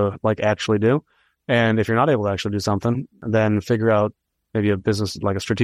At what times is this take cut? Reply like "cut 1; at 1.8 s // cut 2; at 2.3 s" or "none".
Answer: cut 1; at 3.2 s